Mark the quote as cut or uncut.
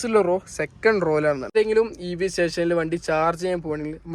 cut